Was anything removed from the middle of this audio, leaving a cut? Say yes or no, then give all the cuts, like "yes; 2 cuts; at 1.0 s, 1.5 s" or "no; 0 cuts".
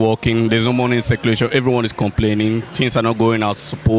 no; 0 cuts